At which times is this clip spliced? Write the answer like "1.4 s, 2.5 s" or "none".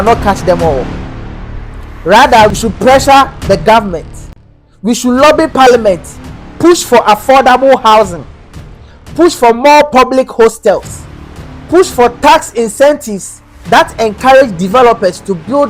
2.6 s